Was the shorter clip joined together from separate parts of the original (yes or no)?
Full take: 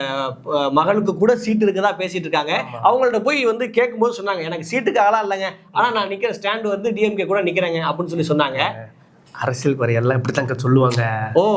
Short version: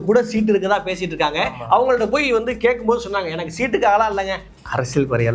yes